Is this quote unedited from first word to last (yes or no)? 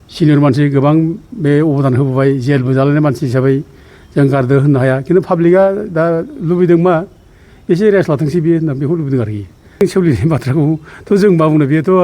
no